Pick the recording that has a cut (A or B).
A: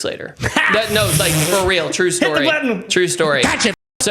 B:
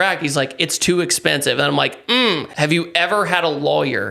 B